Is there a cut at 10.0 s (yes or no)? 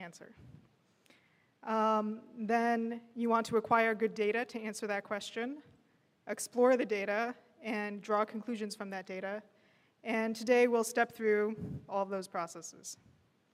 no